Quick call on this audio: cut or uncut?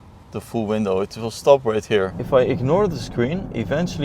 cut